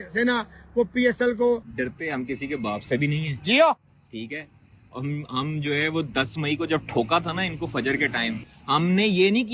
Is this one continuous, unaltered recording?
no; 2 cuts; at 1.7 s, 8.5 s

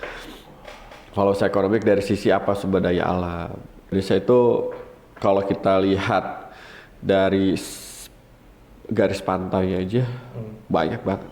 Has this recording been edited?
yes; 1 cut; at 3.9 s

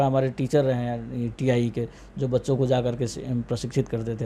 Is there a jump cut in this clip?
no; 0 cuts

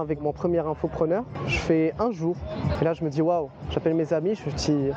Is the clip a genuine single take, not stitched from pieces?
no; 2 cuts; at 1.3 s, 2.7 s

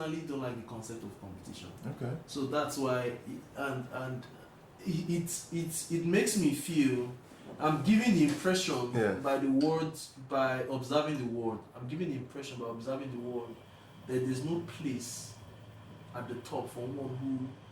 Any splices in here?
no; 0 cuts

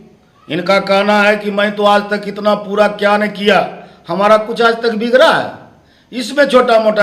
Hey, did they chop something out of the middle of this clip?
no; 0 cuts

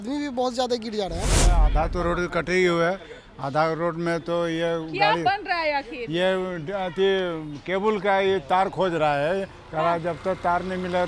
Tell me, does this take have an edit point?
yes; 1 cut; at 1.5 s

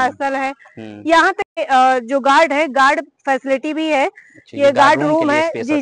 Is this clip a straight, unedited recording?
no; 1 cut; at 1.5 s

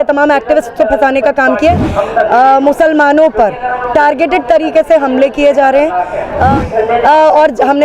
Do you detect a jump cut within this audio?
yes; 2 cuts; at 1.8 s, 6.6 s

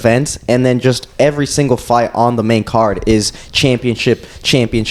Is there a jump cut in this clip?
no; 0 cuts

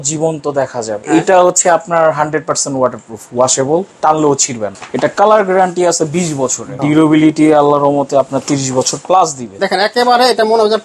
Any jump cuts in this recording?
yes; 4 cuts; at 0.9 s, 4.7 s, 6.7 s, 9.6 s

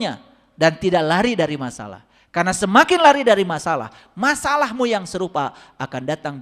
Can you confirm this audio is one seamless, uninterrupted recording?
yes; 0 cuts

